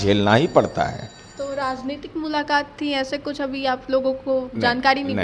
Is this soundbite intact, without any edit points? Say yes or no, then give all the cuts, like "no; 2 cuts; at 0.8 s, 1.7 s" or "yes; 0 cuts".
yes; 0 cuts